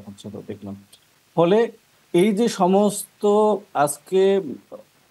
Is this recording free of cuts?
yes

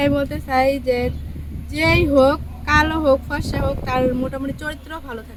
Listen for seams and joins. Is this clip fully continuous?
yes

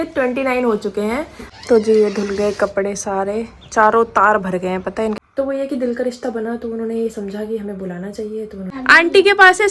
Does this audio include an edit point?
yes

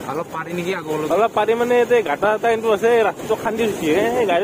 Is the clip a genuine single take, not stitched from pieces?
yes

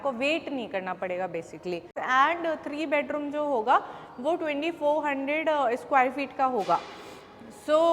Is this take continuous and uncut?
no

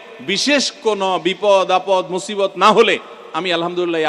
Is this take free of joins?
yes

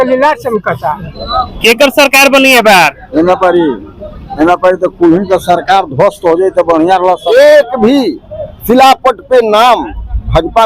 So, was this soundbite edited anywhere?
yes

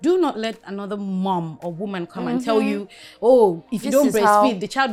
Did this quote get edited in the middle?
no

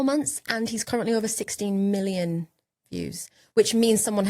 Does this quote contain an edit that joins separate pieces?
no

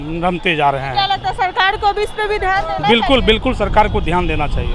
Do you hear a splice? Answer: no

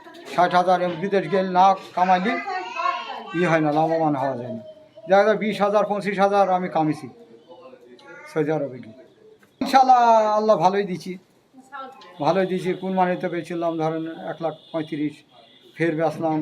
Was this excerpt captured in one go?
no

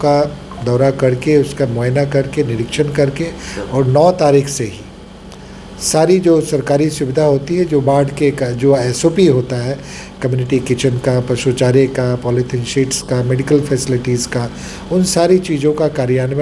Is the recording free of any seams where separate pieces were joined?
yes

